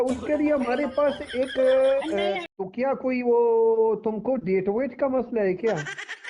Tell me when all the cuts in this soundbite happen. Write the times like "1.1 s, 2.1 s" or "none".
2.4 s

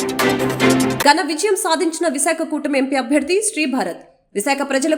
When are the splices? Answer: 1.0 s

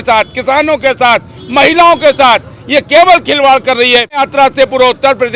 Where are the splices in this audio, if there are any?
4.2 s

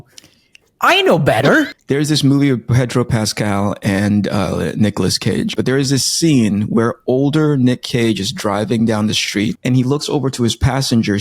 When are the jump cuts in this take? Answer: 1.7 s, 5.5 s, 9.6 s

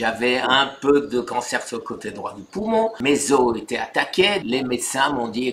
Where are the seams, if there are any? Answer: 3.0 s, 4.4 s

